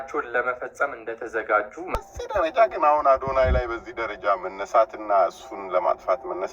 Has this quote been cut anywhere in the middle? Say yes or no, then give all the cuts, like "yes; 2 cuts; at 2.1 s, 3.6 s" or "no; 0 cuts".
yes; 1 cut; at 1.9 s